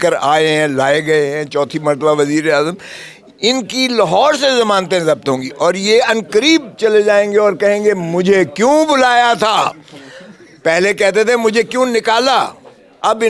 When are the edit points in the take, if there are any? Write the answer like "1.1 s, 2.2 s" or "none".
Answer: none